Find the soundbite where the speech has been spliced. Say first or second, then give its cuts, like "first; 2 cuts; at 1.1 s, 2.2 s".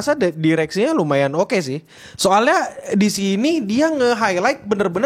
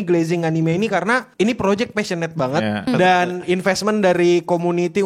second; 2 cuts; at 1.3 s, 2.9 s